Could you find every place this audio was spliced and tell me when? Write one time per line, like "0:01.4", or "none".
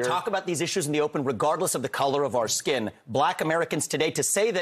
0:03.3